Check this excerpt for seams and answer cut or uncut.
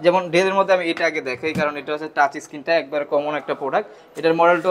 uncut